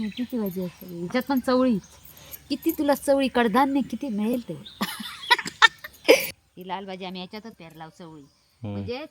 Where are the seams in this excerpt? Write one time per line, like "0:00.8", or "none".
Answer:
0:06.4